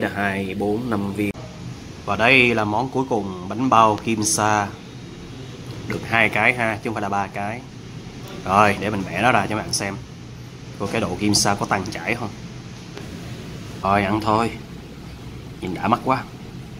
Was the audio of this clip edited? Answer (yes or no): yes